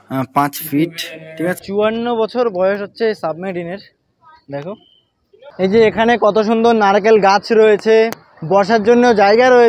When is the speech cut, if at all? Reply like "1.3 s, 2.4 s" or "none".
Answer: 1.6 s, 5.4 s